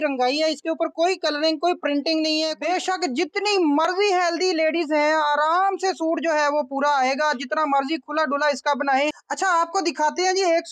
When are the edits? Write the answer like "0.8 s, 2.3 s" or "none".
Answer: 2.5 s, 9.3 s